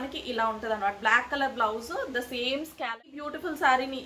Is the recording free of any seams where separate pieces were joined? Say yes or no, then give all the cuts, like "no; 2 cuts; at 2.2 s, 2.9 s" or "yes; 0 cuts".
no; 1 cut; at 2.7 s